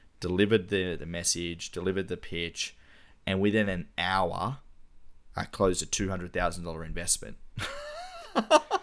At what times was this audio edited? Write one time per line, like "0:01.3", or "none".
none

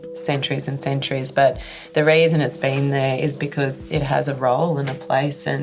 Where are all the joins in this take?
0:03.8

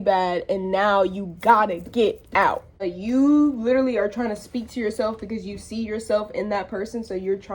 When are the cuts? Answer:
0:02.9

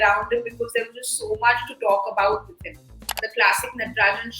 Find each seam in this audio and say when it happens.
0:03.2

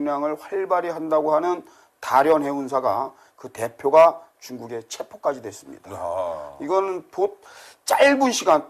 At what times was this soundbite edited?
0:05.6

